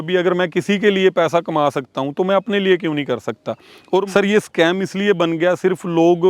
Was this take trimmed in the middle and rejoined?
yes; 1 cut; at 3.8 s

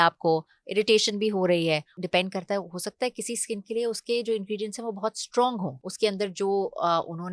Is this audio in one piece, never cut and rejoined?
no; 2 cuts; at 1.9 s, 5.8 s

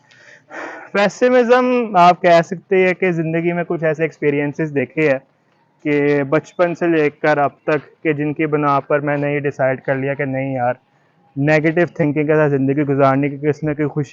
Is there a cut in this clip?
no; 0 cuts

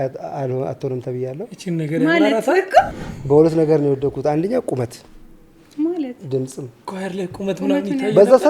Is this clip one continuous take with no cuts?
no; 1 cut; at 2.9 s

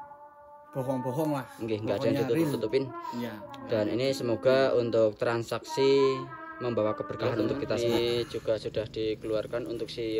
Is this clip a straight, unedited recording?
no; 1 cut; at 7.8 s

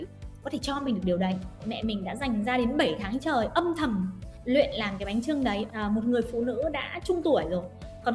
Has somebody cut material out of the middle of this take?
yes; 2 cuts; at 1.6 s, 5.6 s

